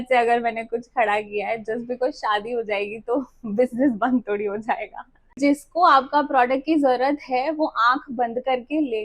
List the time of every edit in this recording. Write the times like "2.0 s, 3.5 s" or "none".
5.4 s